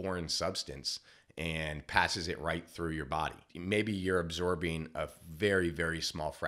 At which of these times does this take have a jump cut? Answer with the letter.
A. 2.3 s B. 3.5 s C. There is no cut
B